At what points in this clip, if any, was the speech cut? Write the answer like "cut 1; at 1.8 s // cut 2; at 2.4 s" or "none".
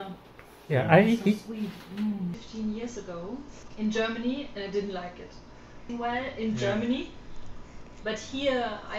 cut 1; at 2.3 s // cut 2; at 3.6 s // cut 3; at 5.8 s